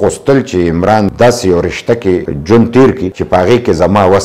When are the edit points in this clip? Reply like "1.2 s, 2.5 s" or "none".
2.3 s